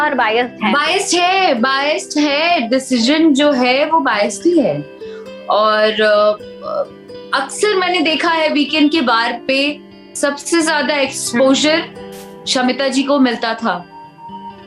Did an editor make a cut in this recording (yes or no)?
no